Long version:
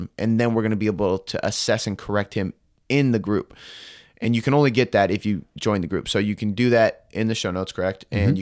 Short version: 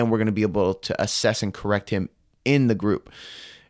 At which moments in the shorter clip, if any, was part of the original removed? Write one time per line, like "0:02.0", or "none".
none